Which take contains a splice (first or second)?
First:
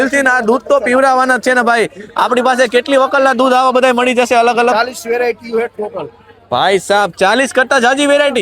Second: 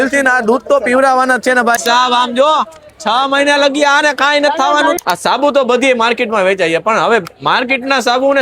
second